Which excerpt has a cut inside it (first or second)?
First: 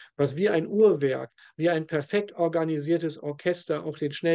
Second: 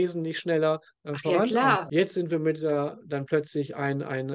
second